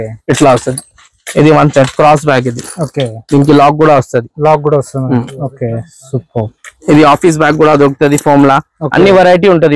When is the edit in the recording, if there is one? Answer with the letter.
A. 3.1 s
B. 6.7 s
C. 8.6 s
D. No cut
B